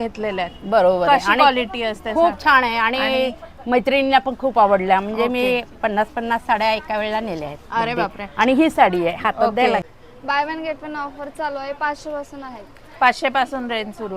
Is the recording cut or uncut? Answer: cut